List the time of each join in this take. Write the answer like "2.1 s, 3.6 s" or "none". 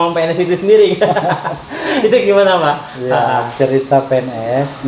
none